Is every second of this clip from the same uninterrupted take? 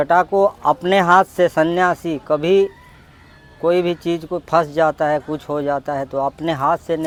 yes; 0 cuts

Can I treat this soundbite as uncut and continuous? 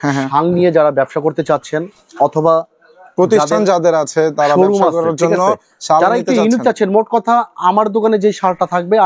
yes; 0 cuts

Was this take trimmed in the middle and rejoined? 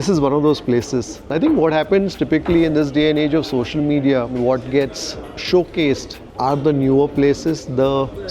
yes; 2 cuts; at 1.2 s, 4.3 s

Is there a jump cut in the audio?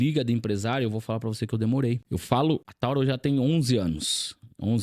yes; 2 cuts; at 2.0 s, 2.7 s

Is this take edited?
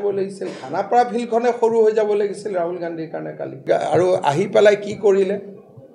yes; 1 cut; at 3.6 s

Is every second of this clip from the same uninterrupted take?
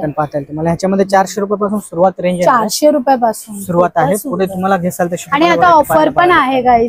yes; 0 cuts

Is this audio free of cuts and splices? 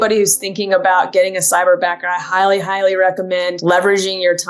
no; 1 cut; at 3.6 s

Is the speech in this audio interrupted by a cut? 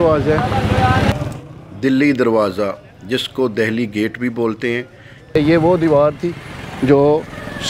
yes; 2 cuts; at 1.1 s, 5.3 s

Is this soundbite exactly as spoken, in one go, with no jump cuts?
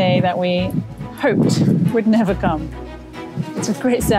yes; 0 cuts

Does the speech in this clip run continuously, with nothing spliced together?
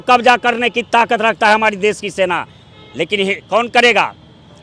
yes; 0 cuts

